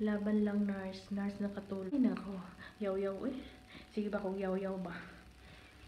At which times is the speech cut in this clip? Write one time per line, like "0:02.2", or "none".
0:01.9